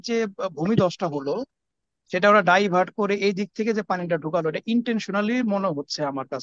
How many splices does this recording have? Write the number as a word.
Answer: zero